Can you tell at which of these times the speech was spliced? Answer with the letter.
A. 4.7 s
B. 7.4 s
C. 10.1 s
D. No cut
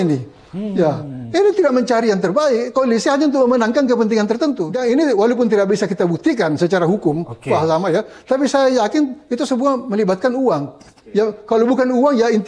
A